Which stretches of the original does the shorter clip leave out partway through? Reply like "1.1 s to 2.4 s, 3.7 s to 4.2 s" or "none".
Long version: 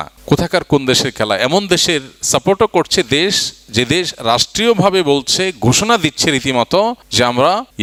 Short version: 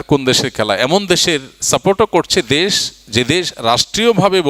none

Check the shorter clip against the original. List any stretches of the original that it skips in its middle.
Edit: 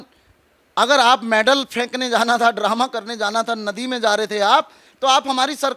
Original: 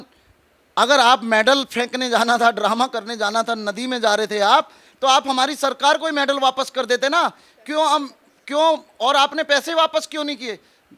none

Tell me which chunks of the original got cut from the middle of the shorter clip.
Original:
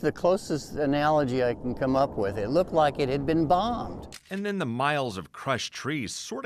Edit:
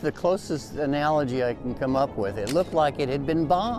none

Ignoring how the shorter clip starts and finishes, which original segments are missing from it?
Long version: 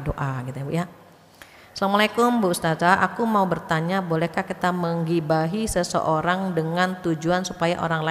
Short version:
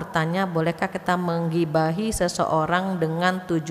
none

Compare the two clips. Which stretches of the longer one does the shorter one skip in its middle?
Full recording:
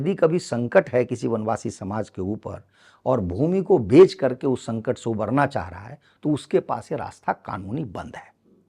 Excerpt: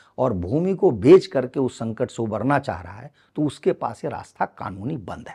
none

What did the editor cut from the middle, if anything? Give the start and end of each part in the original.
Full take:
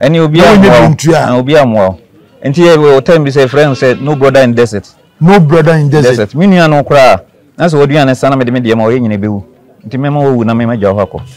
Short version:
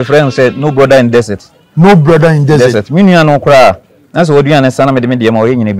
none

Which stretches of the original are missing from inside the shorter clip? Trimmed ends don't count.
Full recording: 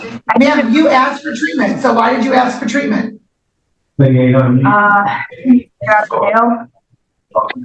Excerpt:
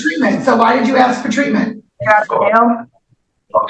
3.3 s to 5.7 s

